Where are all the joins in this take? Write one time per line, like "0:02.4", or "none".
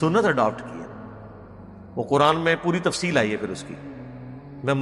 none

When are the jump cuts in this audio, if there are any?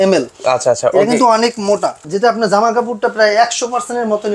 0:02.0

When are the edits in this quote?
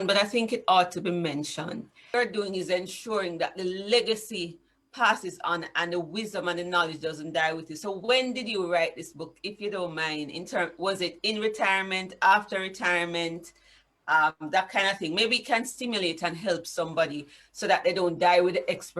0:02.1

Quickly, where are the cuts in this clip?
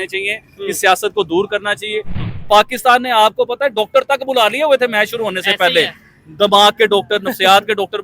0:02.1

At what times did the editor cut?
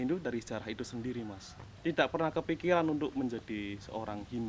0:01.5

